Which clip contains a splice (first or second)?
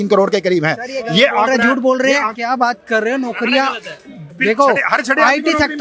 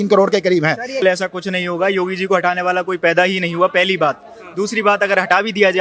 second